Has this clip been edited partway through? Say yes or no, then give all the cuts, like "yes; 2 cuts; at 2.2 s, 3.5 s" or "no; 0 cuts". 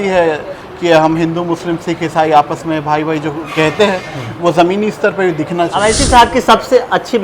yes; 1 cut; at 5.8 s